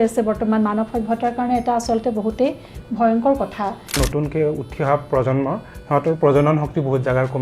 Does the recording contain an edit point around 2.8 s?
no; 1 cut; at 4.0 s

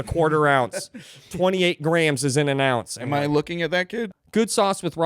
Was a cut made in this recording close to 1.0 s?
no; 1 cut; at 4.1 s

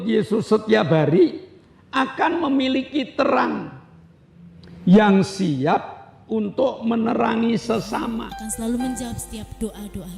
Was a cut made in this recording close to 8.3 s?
yes; 1 cut; at 8.3 s

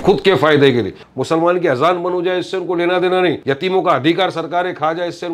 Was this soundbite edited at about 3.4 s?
yes; 2 cuts; at 1.0 s, 3.4 s

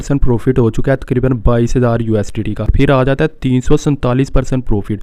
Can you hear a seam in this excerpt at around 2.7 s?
yes; 1 cut; at 2.7 s

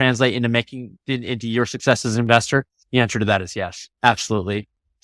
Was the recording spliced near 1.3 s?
no; 0 cuts

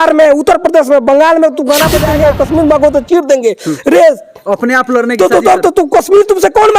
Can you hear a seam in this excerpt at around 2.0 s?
yes; 1 cut; at 2.0 s

